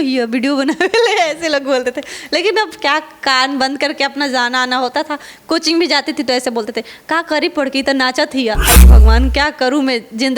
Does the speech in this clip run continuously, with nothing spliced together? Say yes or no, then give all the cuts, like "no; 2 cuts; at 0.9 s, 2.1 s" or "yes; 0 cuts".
no; 1 cut; at 8.8 s